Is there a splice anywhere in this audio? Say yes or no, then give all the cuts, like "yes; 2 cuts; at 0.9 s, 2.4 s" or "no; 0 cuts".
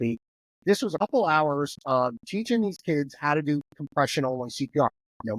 yes; 1 cut; at 1.0 s